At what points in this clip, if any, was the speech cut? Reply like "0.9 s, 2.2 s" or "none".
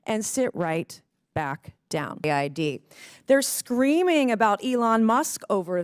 2.2 s